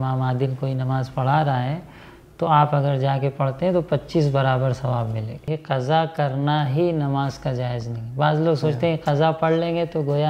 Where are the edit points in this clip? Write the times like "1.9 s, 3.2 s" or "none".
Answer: 5.5 s